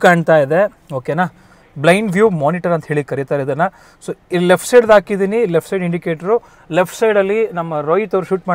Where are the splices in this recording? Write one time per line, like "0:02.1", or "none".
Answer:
none

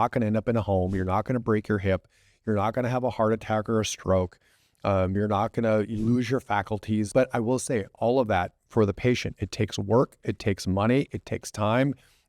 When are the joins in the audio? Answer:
0:05.2
0:07.1

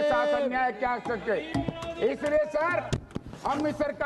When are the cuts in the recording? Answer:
none

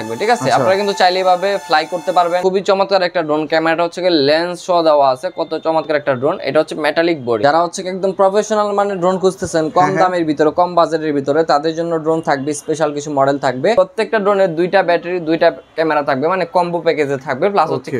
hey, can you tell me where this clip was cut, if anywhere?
0:02.4
0:07.4
0:13.7

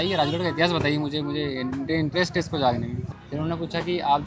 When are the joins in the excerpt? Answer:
0:03.0

